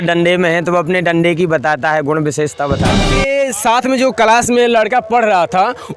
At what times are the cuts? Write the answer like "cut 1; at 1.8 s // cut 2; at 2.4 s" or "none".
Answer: cut 1; at 3.1 s